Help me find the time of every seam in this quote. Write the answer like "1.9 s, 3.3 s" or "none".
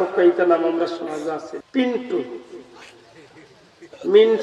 1.6 s